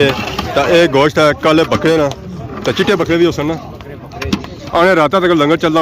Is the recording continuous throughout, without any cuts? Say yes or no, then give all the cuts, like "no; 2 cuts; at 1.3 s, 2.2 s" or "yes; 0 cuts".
no; 1 cut; at 4.6 s